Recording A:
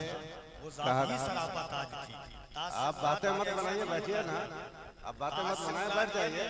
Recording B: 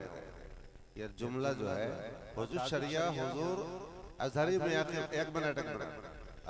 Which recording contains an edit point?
B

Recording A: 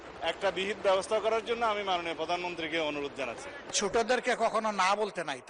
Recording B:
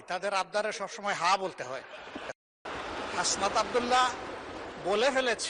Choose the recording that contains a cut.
A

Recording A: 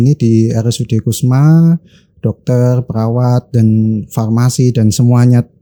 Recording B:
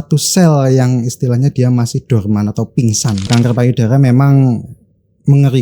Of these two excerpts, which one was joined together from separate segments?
B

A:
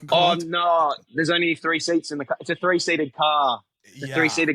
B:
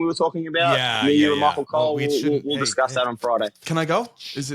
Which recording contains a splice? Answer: B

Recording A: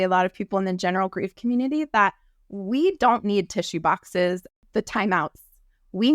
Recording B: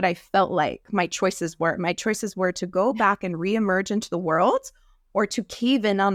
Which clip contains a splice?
A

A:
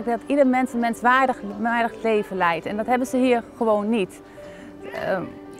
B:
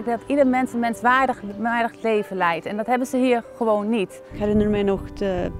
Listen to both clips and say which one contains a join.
B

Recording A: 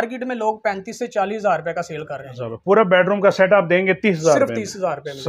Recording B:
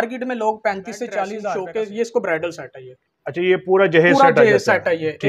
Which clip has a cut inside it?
B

